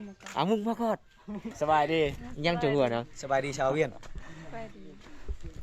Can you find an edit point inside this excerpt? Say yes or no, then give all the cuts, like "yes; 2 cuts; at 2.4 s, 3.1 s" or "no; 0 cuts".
yes; 1 cut; at 1.5 s